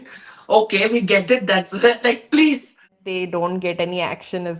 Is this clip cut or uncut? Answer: cut